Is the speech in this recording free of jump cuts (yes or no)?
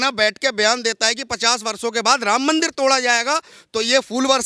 yes